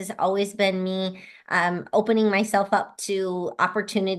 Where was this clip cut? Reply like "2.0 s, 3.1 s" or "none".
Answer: none